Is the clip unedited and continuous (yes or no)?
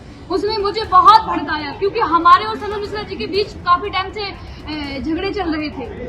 yes